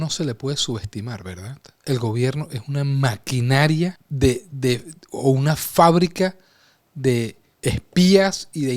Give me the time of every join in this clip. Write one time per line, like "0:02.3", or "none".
0:04.0
0:07.5